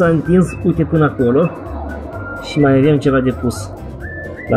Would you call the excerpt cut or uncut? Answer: uncut